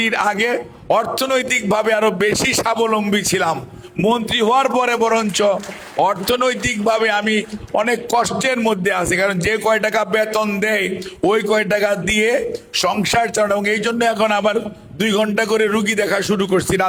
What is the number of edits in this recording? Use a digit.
0